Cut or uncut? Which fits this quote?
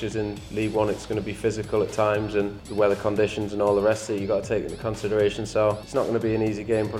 cut